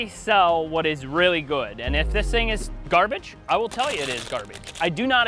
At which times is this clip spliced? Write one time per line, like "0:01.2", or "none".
none